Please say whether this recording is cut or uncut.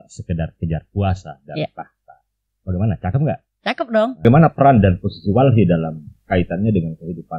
cut